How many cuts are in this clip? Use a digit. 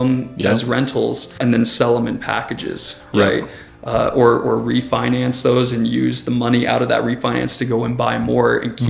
1